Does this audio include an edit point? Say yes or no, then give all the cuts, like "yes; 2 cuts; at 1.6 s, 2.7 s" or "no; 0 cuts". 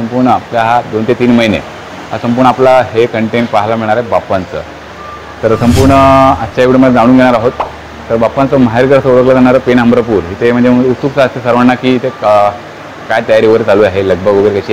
no; 0 cuts